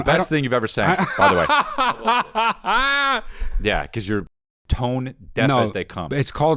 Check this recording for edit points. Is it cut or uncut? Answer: uncut